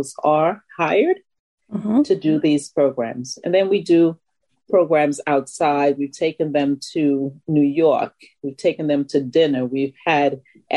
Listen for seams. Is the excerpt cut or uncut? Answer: uncut